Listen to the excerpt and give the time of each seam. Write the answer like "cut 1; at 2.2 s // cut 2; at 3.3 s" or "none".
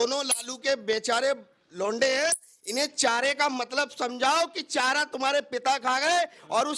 none